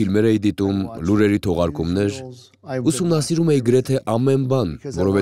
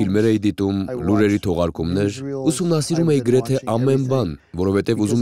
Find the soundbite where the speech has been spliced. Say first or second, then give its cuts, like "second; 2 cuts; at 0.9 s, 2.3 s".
second; 1 cut; at 2.3 s